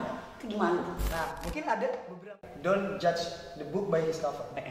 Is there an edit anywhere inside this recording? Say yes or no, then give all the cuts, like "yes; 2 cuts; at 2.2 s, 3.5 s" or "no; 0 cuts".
yes; 1 cut; at 2.2 s